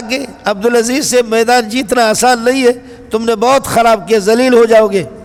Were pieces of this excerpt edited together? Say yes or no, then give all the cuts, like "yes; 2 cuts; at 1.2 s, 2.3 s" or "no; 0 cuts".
no; 0 cuts